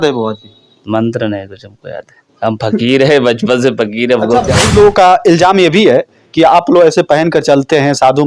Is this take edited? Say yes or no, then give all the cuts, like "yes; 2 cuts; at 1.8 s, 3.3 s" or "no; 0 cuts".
yes; 1 cut; at 4.5 s